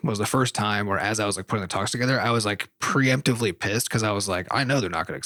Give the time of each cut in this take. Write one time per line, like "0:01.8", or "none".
none